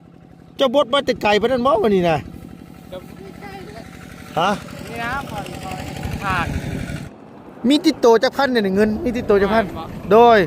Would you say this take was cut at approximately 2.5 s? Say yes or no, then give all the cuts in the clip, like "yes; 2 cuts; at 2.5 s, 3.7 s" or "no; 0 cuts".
no; 1 cut; at 7.0 s